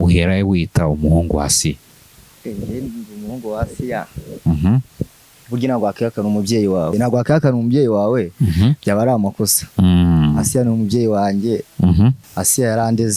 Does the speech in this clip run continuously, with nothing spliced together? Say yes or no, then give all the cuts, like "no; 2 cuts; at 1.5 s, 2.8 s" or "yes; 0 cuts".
no; 2 cuts; at 6.9 s, 12.2 s